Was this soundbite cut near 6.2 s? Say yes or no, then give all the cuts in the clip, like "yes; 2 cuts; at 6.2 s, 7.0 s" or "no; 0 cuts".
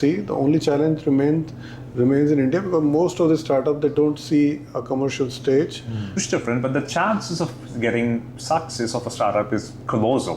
yes; 1 cut; at 6.2 s